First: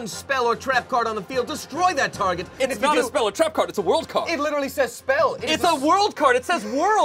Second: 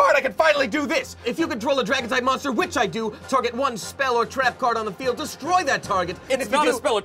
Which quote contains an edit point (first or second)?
second